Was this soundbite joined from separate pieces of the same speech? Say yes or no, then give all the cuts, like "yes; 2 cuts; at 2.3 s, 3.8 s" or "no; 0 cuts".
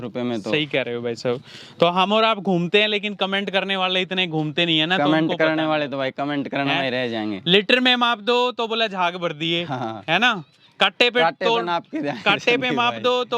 no; 0 cuts